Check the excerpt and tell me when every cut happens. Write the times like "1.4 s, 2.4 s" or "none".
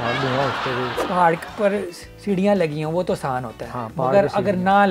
1.0 s